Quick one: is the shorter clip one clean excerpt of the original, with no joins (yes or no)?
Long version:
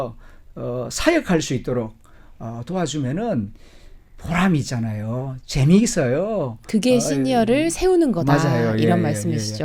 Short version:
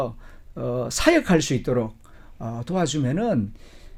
yes